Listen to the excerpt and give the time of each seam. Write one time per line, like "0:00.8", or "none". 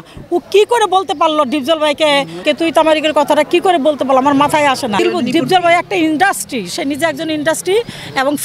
0:02.4
0:05.0